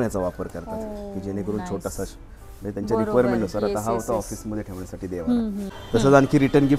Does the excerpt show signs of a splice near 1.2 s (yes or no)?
no